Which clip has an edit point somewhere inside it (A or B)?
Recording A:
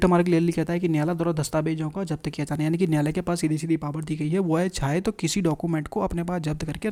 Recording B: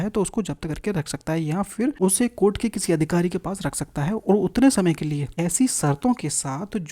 B